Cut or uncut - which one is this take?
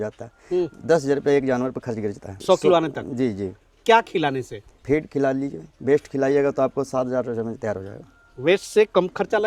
uncut